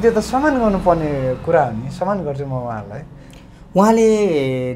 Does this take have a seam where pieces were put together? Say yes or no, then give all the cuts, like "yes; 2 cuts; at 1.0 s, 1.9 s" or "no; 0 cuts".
no; 0 cuts